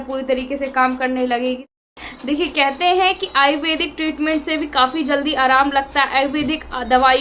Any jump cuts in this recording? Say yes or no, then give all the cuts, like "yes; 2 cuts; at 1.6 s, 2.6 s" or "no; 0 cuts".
yes; 1 cut; at 1.7 s